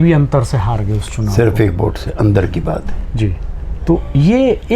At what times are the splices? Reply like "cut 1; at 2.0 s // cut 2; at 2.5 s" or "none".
none